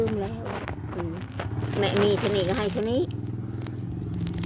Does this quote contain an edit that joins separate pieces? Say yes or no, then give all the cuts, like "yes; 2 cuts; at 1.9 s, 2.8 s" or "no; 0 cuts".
no; 0 cuts